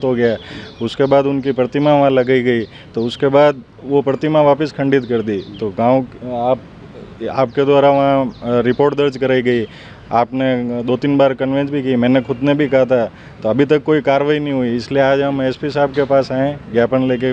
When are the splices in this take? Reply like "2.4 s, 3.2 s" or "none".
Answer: none